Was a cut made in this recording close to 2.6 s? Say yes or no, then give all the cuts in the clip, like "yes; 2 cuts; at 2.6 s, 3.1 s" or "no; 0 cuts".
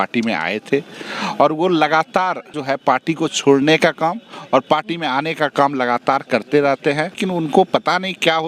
yes; 2 cuts; at 2.6 s, 7.2 s